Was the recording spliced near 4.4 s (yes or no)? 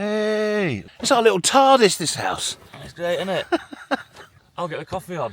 yes